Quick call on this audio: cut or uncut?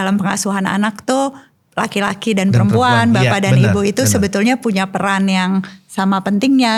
uncut